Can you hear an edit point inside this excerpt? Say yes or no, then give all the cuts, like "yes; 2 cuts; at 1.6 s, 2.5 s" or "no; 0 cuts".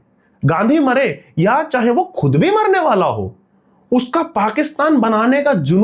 no; 0 cuts